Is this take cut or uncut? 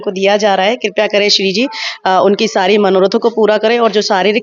uncut